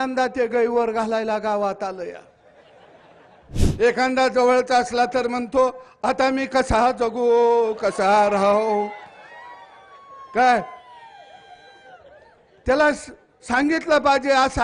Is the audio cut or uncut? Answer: cut